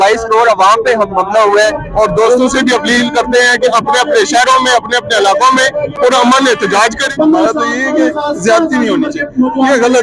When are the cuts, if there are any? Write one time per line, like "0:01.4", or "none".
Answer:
0:01.8
0:07.1